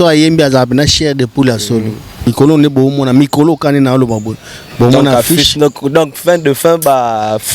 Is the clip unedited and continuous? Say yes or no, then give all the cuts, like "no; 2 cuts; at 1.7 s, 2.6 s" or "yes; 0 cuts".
no; 1 cut; at 2.3 s